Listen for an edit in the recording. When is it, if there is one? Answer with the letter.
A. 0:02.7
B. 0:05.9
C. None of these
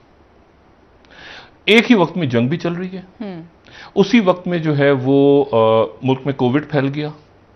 C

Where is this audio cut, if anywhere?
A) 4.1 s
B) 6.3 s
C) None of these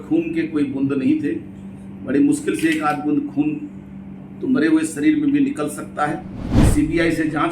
B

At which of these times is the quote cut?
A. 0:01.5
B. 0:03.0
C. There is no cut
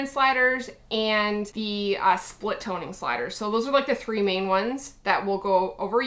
A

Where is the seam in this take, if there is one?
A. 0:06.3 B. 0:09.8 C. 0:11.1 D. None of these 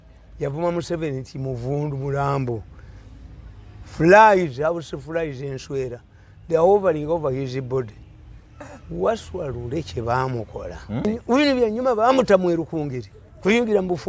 C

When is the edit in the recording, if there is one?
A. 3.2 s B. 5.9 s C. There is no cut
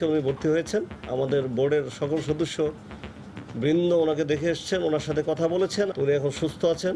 B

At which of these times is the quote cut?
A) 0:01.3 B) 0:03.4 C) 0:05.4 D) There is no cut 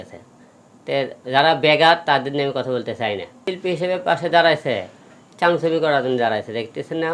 B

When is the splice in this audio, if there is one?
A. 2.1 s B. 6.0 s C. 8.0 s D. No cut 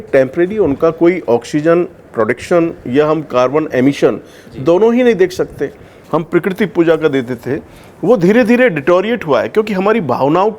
B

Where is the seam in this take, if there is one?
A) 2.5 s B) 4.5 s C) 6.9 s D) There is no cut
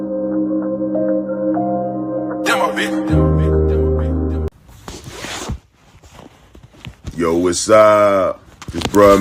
B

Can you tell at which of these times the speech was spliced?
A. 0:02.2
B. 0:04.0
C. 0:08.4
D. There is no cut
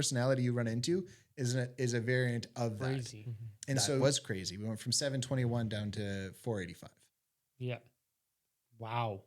B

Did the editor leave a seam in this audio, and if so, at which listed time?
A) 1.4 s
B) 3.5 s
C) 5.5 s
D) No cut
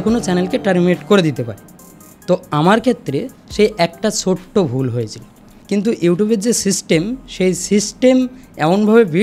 C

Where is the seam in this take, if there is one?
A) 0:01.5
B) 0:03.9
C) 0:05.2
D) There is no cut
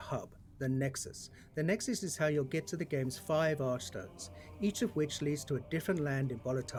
D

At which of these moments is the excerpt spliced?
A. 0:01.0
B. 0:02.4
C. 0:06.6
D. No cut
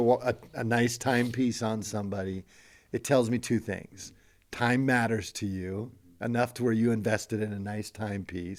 D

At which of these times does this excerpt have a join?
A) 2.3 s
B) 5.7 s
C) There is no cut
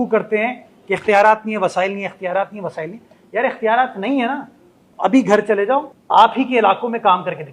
B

